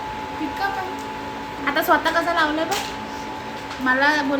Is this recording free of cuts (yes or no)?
yes